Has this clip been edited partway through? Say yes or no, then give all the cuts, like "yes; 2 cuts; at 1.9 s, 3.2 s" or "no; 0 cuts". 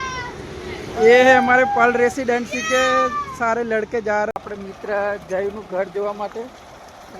yes; 1 cut; at 4.4 s